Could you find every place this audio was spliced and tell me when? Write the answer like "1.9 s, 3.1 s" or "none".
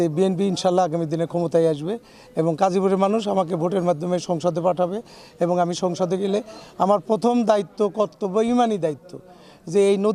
none